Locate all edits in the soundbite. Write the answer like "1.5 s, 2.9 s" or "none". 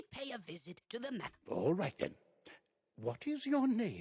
1.4 s